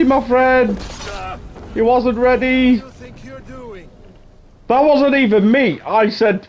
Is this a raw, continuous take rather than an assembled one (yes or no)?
no